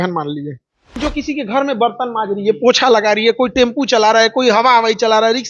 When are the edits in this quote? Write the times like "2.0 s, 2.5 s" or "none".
1.0 s